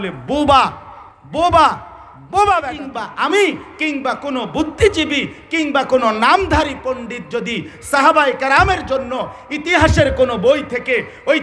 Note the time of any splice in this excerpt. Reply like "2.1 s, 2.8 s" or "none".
3.0 s